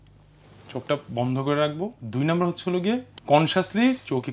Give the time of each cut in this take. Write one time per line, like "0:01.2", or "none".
0:01.9
0:03.1